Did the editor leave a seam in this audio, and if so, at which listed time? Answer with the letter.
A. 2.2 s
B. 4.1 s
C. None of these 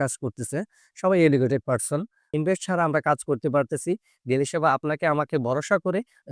A